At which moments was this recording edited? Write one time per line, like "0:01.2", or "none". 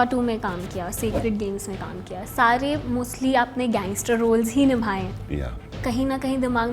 0:05.8